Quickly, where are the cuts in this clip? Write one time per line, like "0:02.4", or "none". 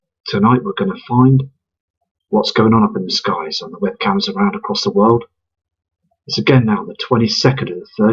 none